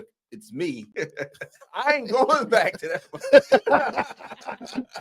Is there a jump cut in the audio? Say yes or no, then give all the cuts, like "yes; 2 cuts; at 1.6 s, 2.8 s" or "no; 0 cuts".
yes; 1 cut; at 0.9 s